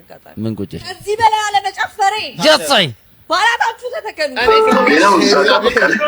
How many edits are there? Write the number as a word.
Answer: one